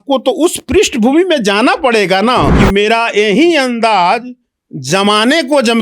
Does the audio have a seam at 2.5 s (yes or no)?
yes